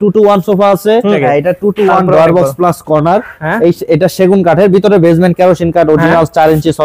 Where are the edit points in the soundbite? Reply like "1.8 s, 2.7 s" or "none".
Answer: 1.2 s